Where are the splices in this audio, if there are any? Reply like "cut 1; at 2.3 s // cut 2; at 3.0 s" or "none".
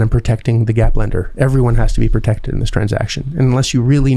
none

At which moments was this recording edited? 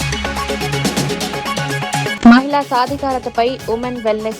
cut 1; at 2.1 s

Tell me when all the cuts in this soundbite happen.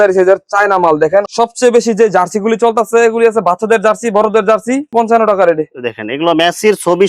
cut 1; at 1.3 s // cut 2; at 4.9 s

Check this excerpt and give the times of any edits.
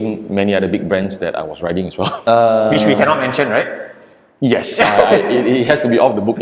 cut 1; at 2.2 s

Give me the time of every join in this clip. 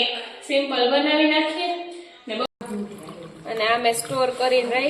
cut 1; at 2.5 s

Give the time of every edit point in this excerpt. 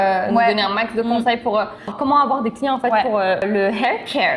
cut 1; at 1.9 s // cut 2; at 3.4 s

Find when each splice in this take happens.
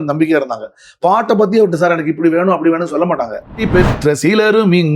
cut 1; at 3.7 s

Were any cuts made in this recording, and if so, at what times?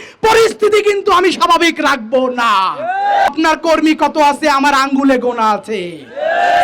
cut 1; at 3.3 s

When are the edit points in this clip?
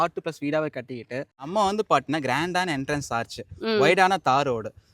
cut 1; at 1.5 s

